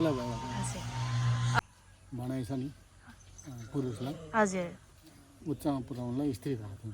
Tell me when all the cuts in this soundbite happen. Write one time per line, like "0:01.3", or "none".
0:01.6